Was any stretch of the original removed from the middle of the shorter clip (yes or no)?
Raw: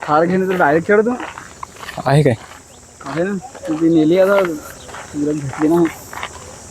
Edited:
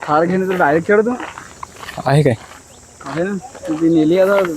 no